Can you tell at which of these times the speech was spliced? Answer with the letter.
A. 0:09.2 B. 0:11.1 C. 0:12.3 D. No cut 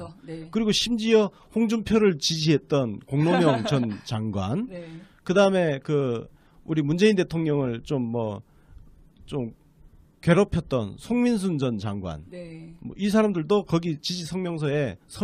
A